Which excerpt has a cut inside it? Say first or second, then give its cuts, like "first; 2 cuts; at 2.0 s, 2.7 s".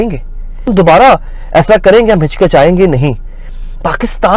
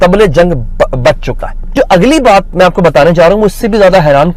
second; 1 cut; at 1.7 s